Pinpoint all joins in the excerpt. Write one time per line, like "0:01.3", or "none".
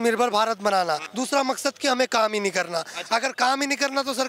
0:01.1